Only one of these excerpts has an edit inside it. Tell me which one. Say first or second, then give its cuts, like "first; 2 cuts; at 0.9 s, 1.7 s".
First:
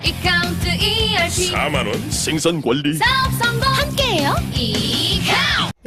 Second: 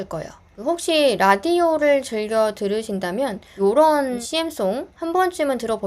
second; 2 cuts; at 3.4 s, 4.2 s